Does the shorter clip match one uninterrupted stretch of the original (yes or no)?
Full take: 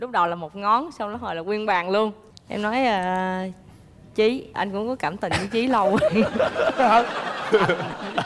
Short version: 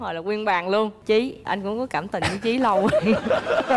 no